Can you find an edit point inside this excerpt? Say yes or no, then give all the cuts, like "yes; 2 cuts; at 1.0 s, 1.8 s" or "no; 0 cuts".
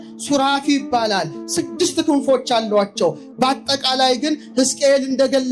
no; 0 cuts